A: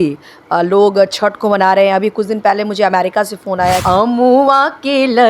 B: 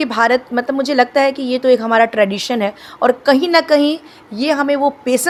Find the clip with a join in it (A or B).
A